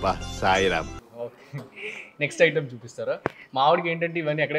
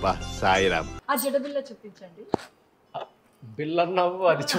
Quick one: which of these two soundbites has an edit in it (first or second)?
second